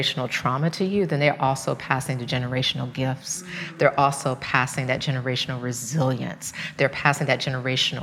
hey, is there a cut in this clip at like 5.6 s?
no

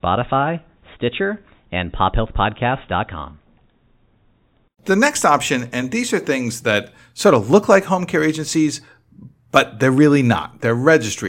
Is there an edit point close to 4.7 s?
yes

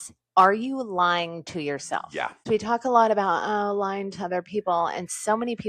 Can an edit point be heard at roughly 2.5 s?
yes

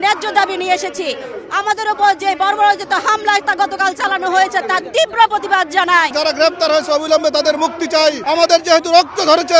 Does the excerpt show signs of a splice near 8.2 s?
yes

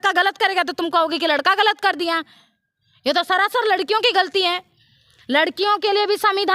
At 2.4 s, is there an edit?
no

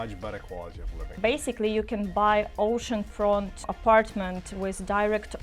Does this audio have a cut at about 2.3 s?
no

